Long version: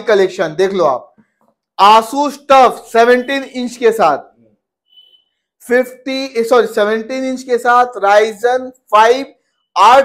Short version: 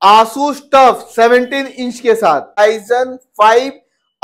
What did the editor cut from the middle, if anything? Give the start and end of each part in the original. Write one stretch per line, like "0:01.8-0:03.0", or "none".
0:04.4-0:08.1